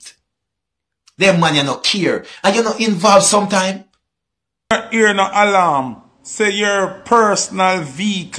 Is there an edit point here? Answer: yes; 1 cut; at 4.7 s

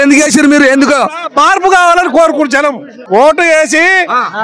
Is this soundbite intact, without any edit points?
no; 1 cut; at 2.9 s

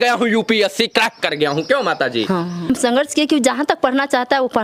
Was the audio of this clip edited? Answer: yes; 1 cut; at 2.7 s

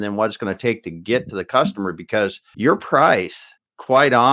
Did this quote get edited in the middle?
yes; 1 cut; at 2.4 s

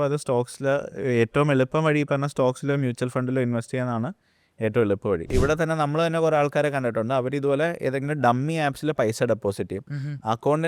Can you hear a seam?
yes; 1 cut; at 5.3 s

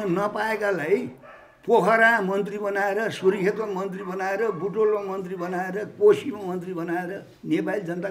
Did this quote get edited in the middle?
no; 0 cuts

